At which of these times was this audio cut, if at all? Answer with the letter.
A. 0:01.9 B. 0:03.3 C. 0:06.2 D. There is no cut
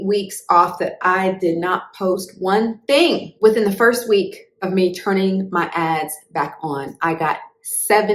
B